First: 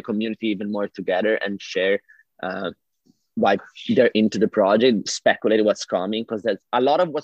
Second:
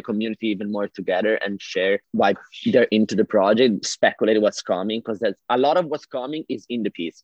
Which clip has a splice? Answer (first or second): second